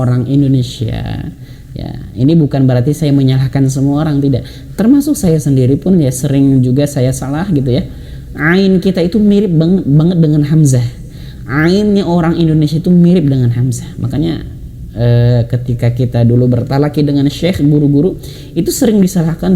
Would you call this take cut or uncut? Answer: uncut